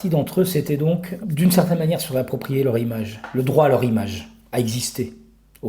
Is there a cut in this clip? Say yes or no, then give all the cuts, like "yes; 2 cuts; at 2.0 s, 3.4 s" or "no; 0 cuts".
yes; 1 cut; at 1.1 s